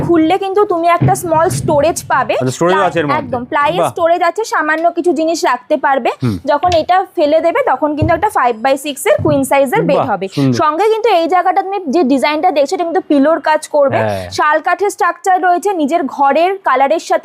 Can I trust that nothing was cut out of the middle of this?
yes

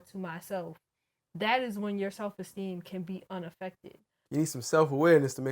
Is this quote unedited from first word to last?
no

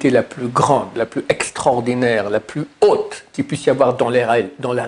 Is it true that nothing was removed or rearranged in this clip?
yes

